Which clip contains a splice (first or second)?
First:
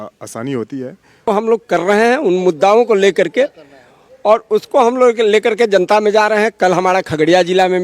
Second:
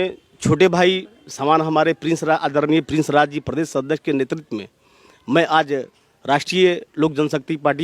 first